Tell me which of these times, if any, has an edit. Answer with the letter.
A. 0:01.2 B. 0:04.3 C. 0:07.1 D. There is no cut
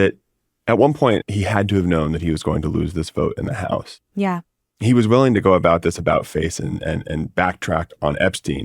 A